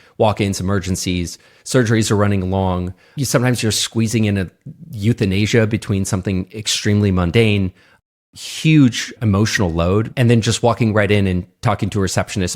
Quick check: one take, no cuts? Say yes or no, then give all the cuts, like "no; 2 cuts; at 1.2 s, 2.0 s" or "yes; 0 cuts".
no; 1 cut; at 10.1 s